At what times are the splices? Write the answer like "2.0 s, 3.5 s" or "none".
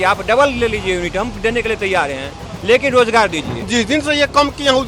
3.7 s